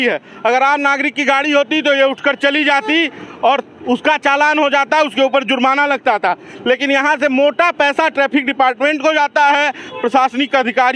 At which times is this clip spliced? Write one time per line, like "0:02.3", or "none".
none